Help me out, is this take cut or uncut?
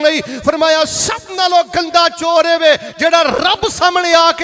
uncut